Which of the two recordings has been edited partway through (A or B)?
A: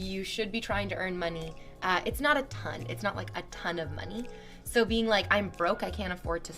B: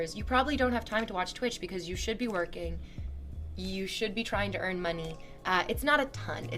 A